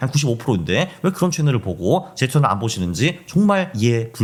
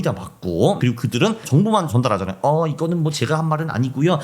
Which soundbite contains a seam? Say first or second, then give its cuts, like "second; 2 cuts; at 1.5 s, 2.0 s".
second; 1 cut; at 1.1 s